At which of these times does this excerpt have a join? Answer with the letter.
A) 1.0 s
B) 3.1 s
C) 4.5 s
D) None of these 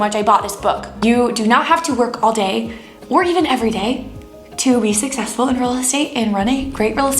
A